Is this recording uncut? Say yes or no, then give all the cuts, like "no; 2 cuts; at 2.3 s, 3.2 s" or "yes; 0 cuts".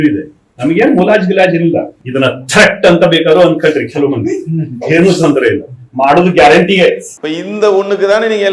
no; 2 cuts; at 2.0 s, 7.1 s